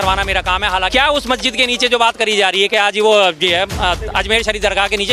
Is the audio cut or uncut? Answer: cut